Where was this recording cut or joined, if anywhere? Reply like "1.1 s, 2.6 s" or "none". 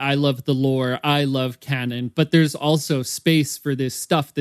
none